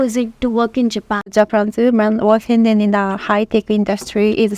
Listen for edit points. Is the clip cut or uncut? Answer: cut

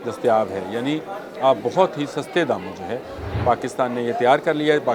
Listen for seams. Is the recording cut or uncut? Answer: uncut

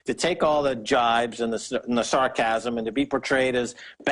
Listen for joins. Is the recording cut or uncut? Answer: cut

